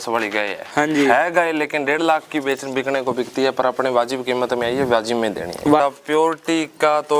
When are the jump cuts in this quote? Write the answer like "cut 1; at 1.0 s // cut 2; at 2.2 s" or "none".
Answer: cut 1; at 5.8 s